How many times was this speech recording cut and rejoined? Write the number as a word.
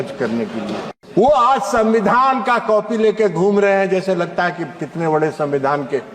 one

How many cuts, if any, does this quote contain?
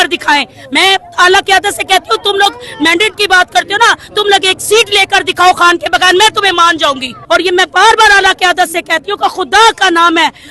one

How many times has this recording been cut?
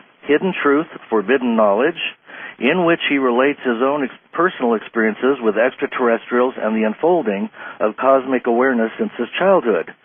one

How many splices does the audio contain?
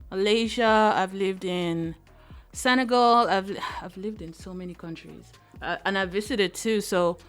one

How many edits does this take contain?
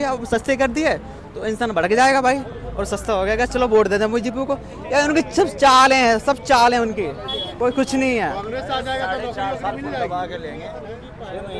zero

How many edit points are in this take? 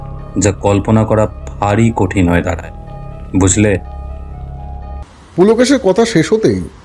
one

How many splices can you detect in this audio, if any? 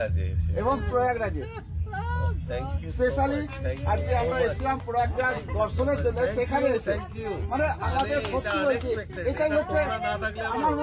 zero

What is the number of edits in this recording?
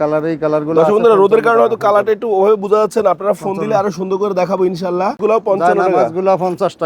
one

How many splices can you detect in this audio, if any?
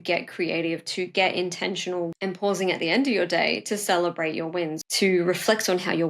two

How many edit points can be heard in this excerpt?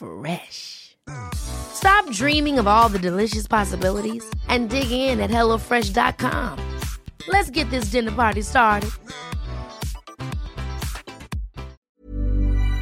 one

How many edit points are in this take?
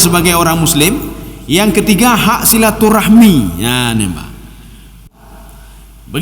one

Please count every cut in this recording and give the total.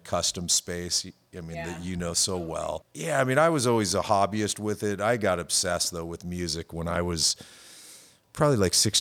one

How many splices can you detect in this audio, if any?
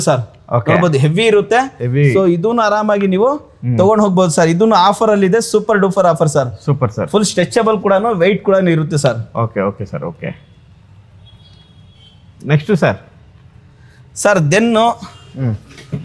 zero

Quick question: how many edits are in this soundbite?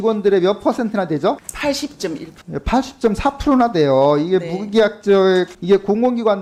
zero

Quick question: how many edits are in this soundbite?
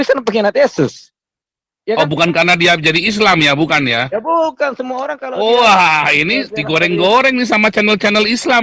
zero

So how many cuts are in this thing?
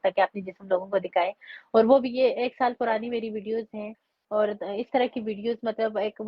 zero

